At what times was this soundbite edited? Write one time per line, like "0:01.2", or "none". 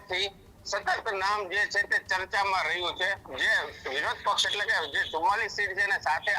0:03.3